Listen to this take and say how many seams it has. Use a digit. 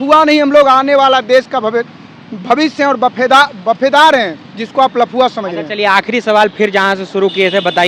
0